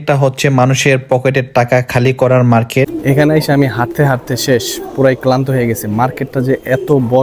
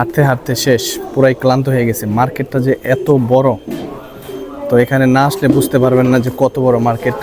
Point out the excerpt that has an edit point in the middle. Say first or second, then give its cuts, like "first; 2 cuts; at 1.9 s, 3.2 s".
first; 1 cut; at 2.9 s